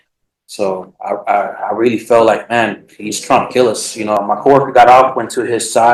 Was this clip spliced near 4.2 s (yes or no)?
yes